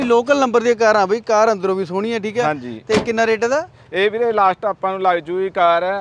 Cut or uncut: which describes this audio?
uncut